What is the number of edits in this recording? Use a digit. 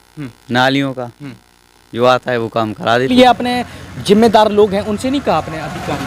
1